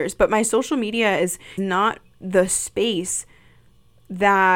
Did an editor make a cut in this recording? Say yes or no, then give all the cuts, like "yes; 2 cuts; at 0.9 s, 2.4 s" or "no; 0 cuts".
yes; 1 cut; at 1.6 s